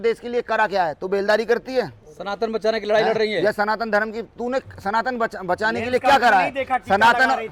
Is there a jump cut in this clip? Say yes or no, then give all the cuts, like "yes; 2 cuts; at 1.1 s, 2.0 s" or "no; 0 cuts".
no; 0 cuts